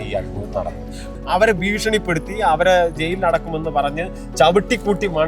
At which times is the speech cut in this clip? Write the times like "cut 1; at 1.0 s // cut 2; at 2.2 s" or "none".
cut 1; at 1.1 s

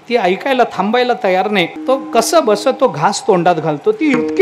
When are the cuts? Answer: cut 1; at 1.7 s

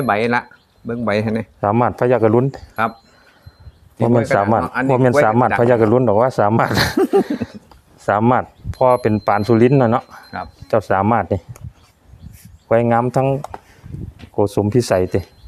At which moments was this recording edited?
none

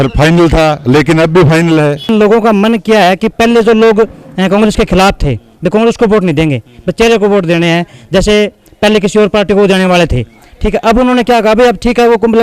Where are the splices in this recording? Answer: cut 1; at 2.1 s

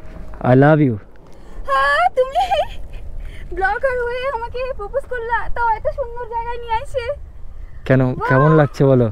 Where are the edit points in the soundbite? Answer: none

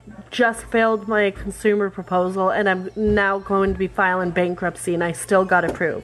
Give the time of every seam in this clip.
none

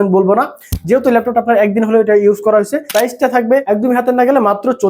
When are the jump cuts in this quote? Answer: cut 1; at 2.8 s // cut 2; at 3.6 s

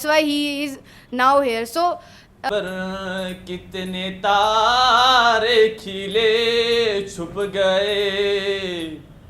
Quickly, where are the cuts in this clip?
cut 1; at 2.4 s

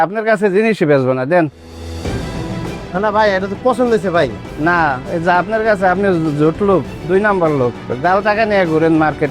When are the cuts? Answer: none

